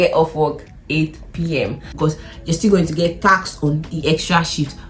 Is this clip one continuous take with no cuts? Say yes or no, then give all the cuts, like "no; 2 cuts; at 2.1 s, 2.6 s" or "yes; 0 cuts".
no; 1 cut; at 1.9 s